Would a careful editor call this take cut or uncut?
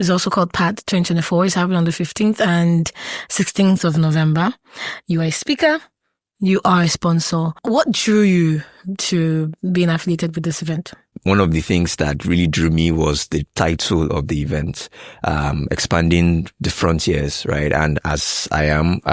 cut